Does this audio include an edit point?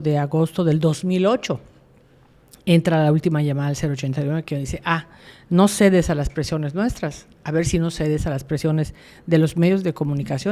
no; 0 cuts

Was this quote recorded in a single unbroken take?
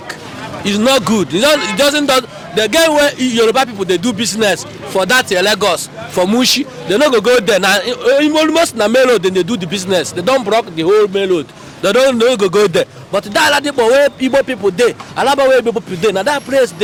yes; 0 cuts

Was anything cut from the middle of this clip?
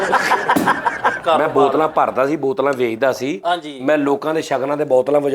yes; 1 cut; at 1.2 s

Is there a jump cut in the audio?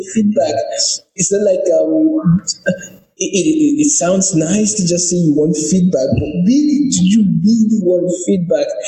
no; 0 cuts

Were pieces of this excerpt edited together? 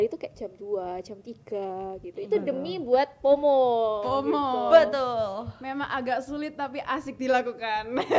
no; 0 cuts

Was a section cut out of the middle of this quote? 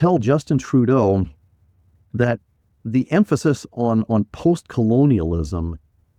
no; 0 cuts

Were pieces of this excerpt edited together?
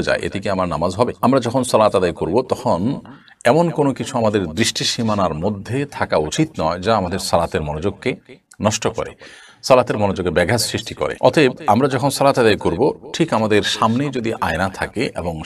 no; 0 cuts

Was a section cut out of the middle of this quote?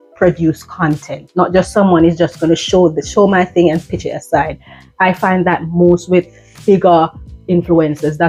no; 0 cuts

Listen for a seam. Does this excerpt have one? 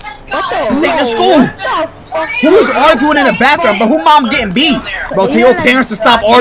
no; 0 cuts

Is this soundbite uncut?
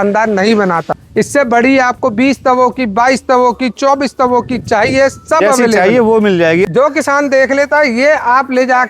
no; 2 cuts; at 0.9 s, 6.7 s

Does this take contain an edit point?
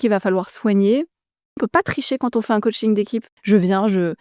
yes; 2 cuts; at 1.6 s, 3.3 s

